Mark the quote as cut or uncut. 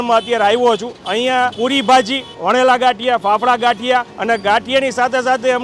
cut